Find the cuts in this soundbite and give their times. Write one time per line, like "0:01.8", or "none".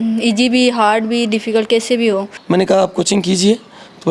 0:02.3